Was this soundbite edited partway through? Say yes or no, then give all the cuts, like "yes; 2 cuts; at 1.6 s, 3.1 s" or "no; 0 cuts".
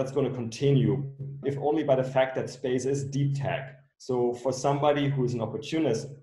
yes; 1 cut; at 1.4 s